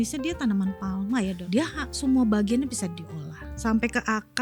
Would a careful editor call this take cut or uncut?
cut